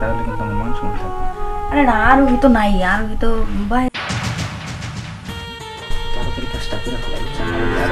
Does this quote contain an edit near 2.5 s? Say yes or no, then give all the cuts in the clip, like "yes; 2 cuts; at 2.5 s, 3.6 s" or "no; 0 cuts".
no; 0 cuts